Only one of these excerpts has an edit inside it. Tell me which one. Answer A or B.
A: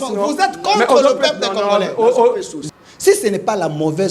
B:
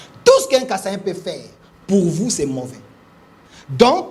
A